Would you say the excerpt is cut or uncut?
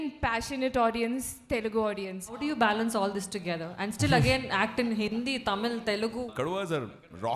cut